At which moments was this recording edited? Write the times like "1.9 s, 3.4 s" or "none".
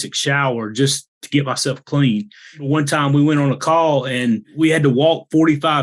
2.7 s, 4.5 s